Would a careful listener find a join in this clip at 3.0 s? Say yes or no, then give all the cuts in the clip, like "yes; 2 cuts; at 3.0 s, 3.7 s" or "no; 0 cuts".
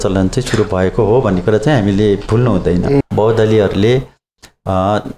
yes; 1 cut; at 3.0 s